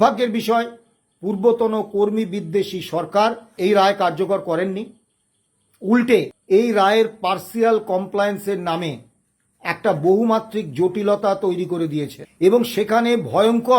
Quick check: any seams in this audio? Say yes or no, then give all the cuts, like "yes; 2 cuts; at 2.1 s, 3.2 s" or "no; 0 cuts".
yes; 3 cuts; at 3.5 s, 6.4 s, 12.2 s